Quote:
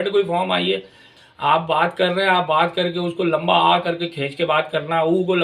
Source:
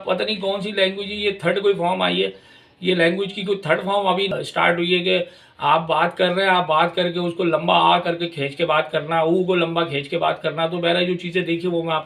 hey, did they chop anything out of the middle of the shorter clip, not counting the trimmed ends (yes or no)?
yes